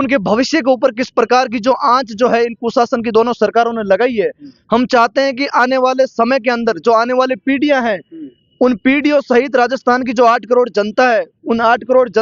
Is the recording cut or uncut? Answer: uncut